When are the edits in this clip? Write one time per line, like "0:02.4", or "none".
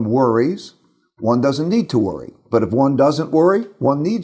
none

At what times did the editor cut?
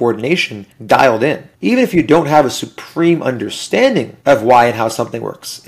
none

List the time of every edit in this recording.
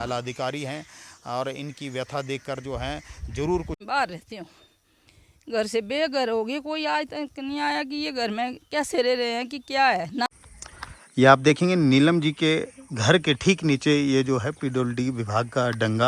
0:03.8
0:10.4

